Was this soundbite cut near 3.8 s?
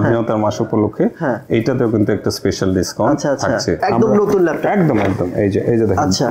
yes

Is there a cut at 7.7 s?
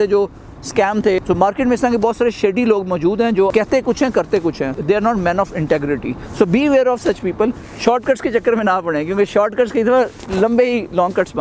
yes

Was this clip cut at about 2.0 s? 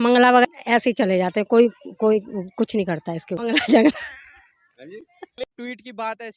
no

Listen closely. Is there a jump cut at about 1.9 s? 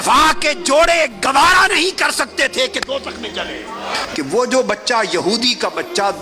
no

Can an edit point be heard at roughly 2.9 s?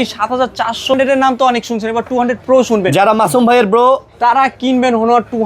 no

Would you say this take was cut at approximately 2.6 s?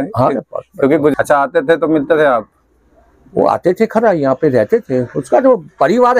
no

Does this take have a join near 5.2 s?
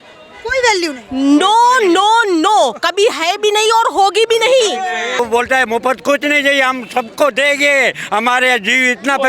yes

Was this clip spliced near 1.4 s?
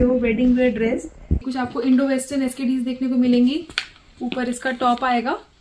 yes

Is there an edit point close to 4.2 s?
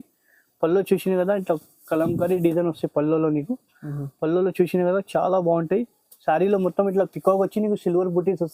no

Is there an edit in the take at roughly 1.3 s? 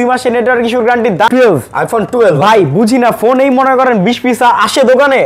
yes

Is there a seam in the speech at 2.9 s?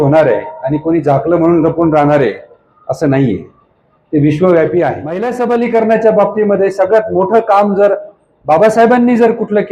no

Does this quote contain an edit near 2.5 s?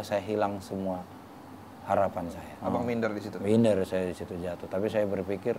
yes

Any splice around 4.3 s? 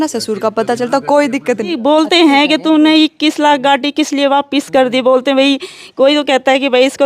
no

